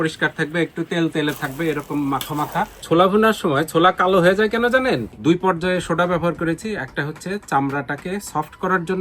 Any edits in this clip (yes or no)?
yes